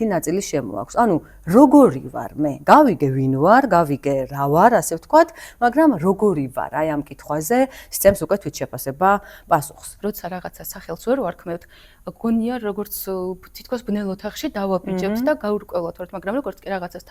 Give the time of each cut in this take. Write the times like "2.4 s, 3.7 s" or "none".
9.8 s